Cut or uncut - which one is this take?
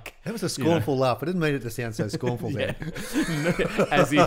uncut